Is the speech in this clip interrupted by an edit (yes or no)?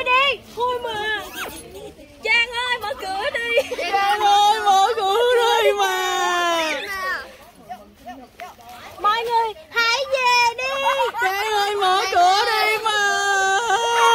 no